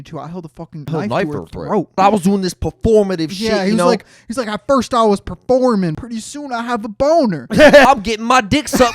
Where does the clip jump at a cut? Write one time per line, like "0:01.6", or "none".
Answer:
0:00.9
0:02.0
0:06.0
0:07.9